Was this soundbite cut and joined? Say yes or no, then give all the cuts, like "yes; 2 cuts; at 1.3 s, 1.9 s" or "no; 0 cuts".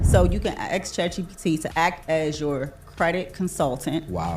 yes; 1 cut; at 1.7 s